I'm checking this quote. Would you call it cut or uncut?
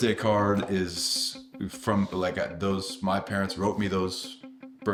uncut